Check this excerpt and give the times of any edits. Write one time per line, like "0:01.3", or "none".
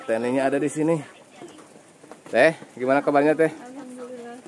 none